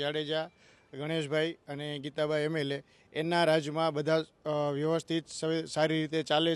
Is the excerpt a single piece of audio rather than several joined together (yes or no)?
yes